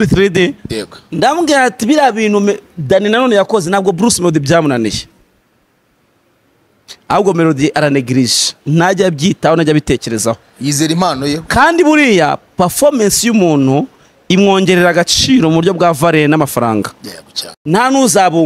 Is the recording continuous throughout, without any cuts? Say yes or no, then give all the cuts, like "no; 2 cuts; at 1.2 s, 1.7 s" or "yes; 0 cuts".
no; 1 cut; at 17.5 s